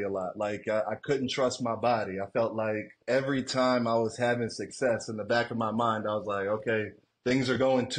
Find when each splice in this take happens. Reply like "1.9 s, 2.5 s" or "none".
3.0 s, 7.0 s